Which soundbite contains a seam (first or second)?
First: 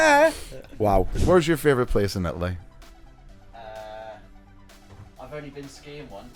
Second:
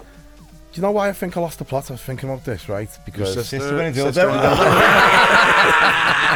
first